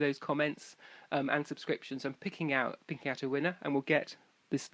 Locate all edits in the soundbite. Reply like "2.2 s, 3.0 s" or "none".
none

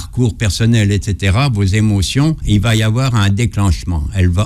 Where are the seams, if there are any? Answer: 2.4 s

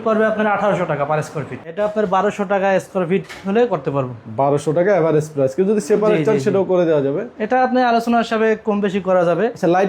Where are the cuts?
1.7 s

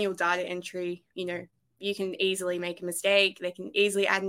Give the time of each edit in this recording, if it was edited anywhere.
none

